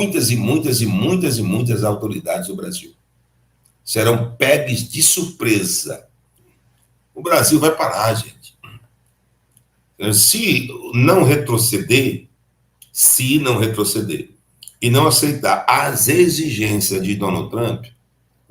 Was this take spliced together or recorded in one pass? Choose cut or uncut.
cut